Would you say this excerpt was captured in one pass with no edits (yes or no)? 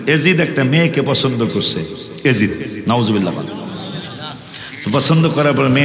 yes